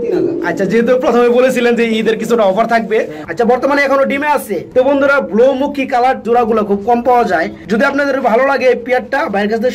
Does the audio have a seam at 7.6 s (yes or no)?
no